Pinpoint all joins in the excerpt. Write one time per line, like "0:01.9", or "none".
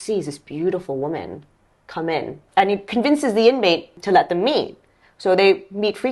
0:02.4
0:03.9

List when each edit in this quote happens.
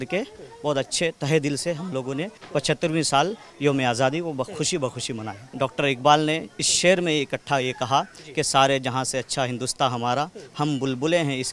0:05.4

